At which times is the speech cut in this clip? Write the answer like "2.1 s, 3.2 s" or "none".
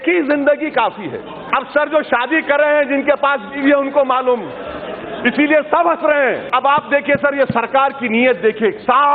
1.4 s, 6.5 s

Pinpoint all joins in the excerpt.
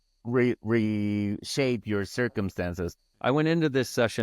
3.1 s

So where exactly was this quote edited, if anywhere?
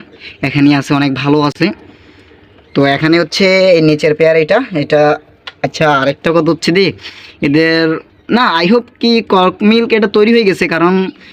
none

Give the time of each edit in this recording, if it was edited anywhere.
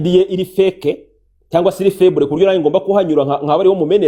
none

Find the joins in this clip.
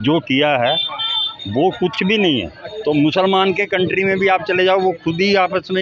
2.6 s

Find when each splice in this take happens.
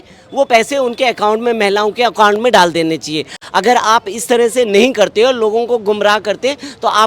3.3 s

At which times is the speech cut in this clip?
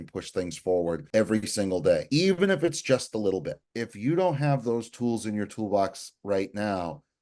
1.0 s, 2.0 s, 3.6 s

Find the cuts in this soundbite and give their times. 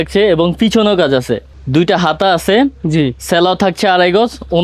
none

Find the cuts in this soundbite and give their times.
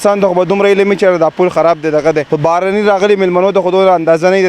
2.3 s

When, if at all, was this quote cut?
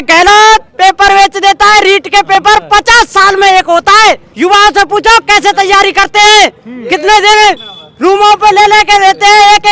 none

